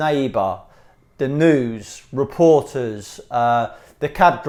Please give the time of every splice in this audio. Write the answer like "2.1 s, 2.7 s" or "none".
none